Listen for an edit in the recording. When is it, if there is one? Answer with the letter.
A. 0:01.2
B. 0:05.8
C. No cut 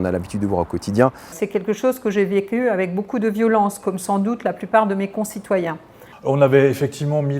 B